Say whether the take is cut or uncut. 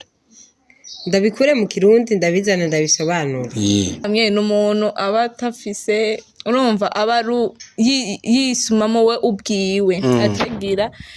cut